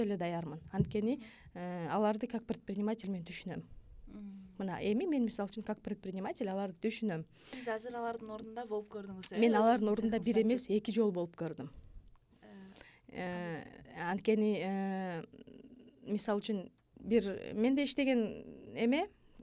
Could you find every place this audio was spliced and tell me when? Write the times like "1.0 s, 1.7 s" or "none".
none